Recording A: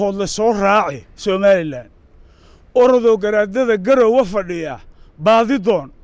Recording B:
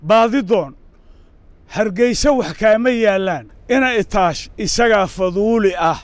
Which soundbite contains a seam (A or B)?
B